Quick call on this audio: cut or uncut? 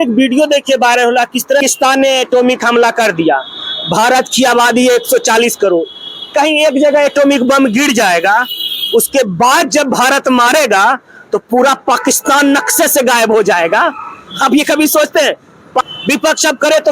cut